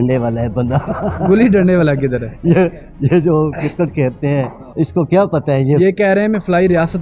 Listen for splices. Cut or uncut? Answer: cut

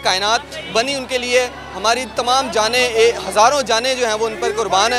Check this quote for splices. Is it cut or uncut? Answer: uncut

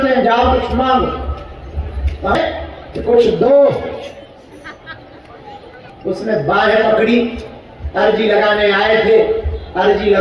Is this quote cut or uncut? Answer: cut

